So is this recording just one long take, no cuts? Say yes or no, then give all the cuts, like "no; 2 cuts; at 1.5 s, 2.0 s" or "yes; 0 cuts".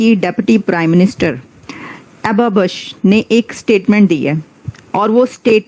yes; 0 cuts